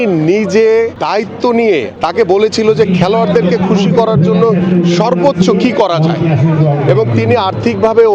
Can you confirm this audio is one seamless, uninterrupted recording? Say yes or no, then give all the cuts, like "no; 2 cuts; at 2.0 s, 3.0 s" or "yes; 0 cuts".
no; 1 cut; at 1.9 s